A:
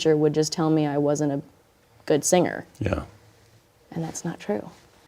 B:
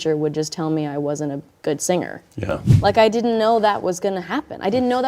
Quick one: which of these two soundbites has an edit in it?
B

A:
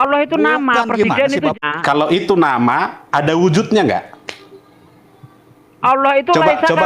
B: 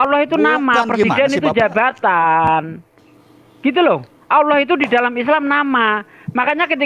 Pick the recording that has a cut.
A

